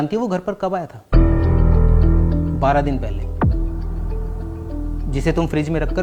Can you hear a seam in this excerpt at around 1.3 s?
no; 0 cuts

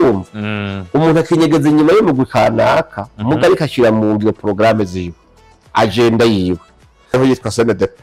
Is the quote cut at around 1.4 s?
no; 1 cut; at 7.1 s

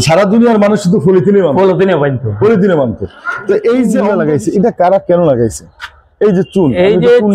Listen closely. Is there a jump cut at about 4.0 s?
yes; 1 cut; at 4.0 s

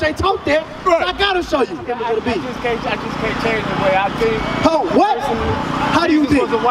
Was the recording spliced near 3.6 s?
no; 1 cut; at 1.9 s

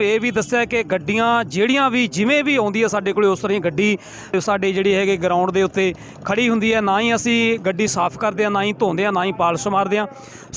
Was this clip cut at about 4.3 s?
yes; 1 cut; at 4.3 s

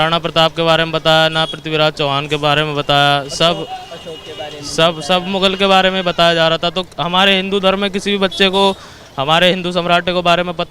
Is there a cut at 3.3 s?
no; 0 cuts

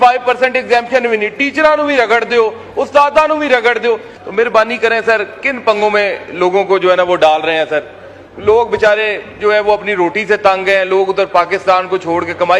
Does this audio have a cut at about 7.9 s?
no; 1 cut; at 4.1 s

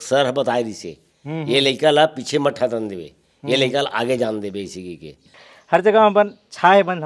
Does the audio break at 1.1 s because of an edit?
no; 1 cut; at 5.4 s

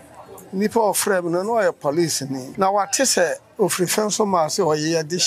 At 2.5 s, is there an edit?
yes; 1 cut; at 2.5 s

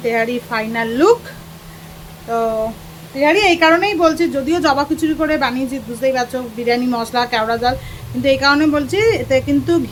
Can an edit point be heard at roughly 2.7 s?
no; 0 cuts

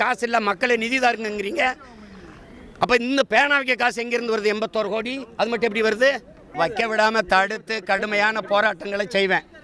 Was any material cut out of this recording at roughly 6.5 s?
yes; 1 cut; at 6.5 s

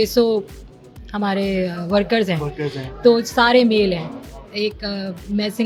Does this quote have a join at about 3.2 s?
no; 0 cuts

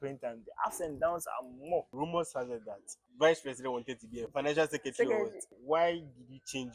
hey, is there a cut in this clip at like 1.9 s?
yes; 4 cuts; at 1.9 s, 3.0 s, 4.3 s, 5.5 s

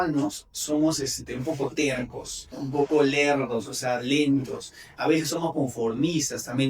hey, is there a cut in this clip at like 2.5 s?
yes; 1 cut; at 2.5 s

